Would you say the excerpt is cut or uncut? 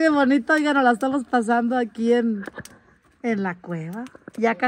uncut